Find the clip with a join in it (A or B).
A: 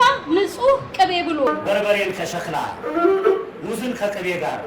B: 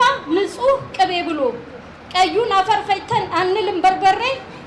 A